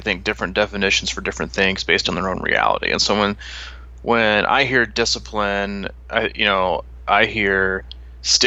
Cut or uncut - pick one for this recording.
uncut